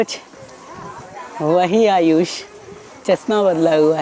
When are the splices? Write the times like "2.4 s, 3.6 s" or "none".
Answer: none